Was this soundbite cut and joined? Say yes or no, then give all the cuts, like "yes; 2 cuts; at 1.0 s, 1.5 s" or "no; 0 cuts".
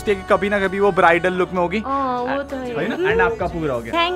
no; 0 cuts